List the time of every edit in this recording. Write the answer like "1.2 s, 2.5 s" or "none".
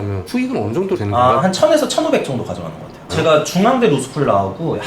1.4 s, 3.1 s